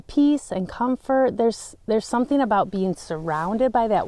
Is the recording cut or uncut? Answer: uncut